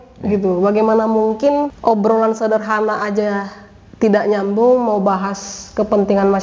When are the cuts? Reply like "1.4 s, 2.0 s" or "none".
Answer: 1.7 s